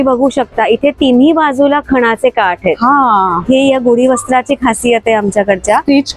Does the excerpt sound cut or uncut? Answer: uncut